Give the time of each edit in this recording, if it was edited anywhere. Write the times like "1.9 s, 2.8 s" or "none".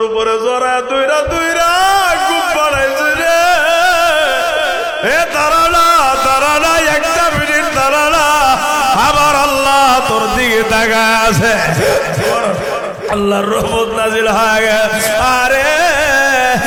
none